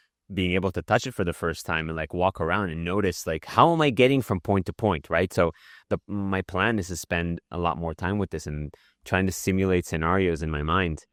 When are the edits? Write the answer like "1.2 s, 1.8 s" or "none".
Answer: none